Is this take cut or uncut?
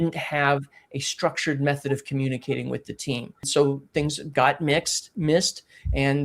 cut